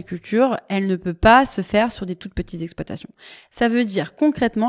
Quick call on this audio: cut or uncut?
uncut